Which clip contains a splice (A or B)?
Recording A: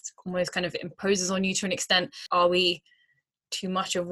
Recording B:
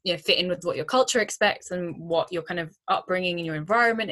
A